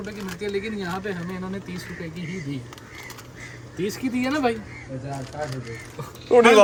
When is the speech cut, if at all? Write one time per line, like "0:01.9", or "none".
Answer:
none